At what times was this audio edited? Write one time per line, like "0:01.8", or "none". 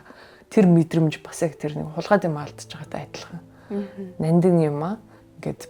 none